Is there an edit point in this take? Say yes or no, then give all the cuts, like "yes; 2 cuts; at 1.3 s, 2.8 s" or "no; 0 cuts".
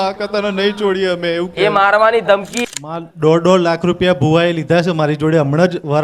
yes; 1 cut; at 2.6 s